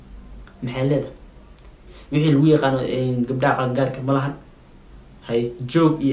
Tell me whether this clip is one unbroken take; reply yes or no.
yes